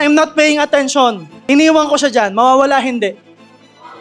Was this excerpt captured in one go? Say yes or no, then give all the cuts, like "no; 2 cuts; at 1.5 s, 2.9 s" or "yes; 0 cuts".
no; 1 cut; at 1.3 s